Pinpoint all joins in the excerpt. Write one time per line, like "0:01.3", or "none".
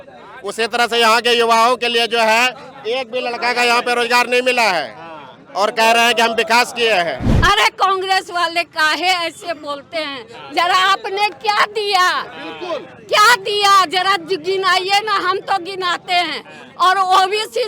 0:07.3